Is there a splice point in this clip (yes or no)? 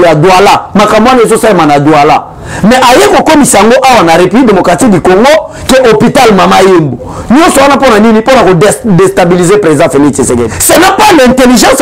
yes